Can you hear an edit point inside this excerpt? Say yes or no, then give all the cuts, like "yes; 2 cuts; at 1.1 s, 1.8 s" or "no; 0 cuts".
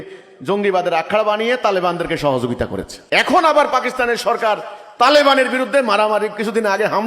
yes; 1 cut; at 2.9 s